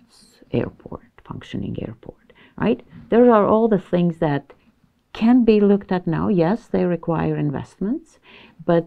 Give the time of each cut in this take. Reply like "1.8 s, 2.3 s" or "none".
none